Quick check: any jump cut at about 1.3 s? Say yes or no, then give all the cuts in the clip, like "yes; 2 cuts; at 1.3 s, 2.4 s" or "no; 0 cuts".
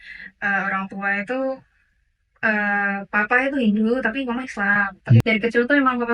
no; 1 cut; at 5.2 s